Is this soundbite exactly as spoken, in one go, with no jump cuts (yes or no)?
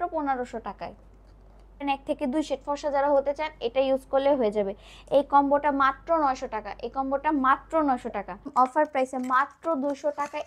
no